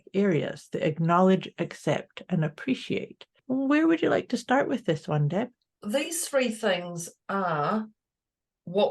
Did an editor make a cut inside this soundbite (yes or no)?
yes